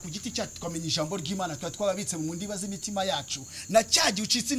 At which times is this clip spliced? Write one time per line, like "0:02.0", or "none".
none